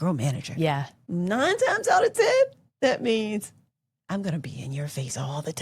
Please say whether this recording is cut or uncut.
cut